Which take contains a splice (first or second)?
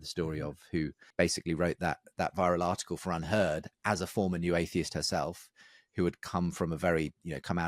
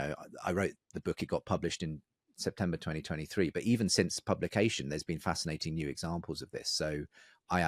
first